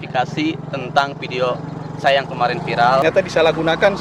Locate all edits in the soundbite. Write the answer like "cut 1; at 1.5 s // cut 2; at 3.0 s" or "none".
cut 1; at 3.0 s